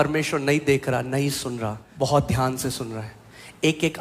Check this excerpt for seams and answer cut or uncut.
cut